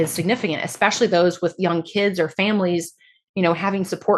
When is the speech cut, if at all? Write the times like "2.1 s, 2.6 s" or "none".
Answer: none